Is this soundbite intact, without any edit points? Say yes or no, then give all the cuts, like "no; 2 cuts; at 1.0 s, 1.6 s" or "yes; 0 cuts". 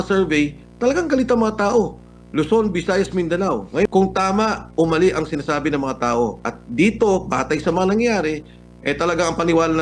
no; 1 cut; at 3.9 s